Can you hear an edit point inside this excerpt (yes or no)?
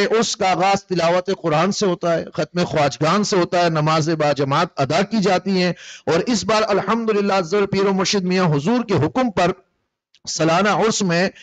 no